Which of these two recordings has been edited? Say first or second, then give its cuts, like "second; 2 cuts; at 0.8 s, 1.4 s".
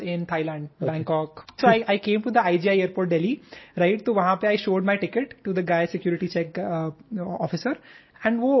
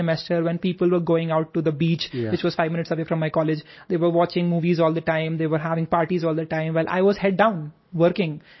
first; 1 cut; at 1.6 s